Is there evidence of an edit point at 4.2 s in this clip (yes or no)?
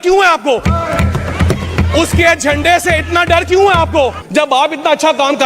yes